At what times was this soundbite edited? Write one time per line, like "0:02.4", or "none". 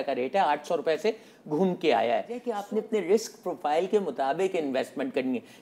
0:02.6

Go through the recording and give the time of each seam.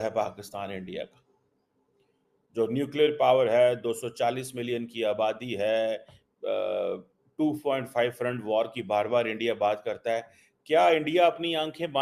none

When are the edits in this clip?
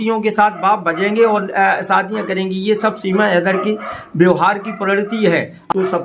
none

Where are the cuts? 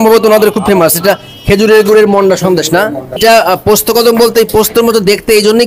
0:03.2

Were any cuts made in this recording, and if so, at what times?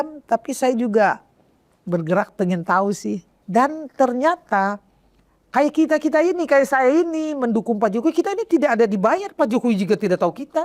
0:03.3

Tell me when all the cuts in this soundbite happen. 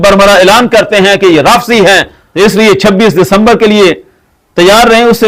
0:02.2

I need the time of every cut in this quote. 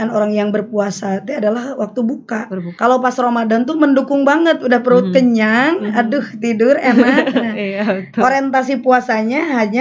0:02.6

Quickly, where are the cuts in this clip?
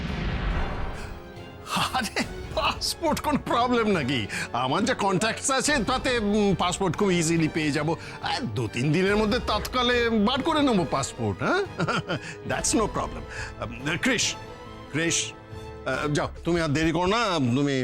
none

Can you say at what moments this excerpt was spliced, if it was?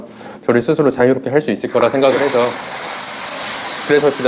none

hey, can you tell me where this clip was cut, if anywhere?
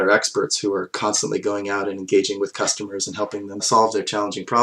none

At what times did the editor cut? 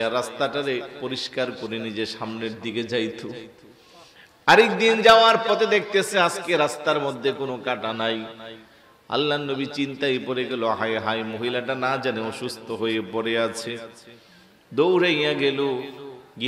none

